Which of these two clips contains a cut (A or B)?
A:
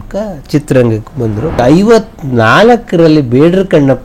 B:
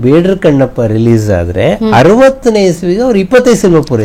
A